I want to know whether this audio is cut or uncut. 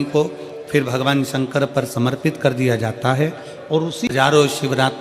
cut